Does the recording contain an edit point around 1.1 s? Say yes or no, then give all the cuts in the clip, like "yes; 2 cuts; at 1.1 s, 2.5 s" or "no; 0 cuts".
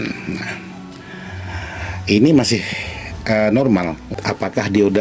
no; 1 cut; at 4.1 s